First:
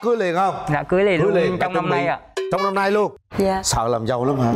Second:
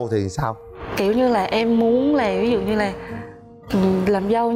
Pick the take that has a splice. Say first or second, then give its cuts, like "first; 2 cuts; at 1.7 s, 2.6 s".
first; 1 cut; at 3.2 s